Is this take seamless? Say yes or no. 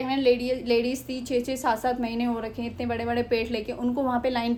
yes